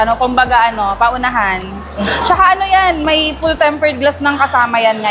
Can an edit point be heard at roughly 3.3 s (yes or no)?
no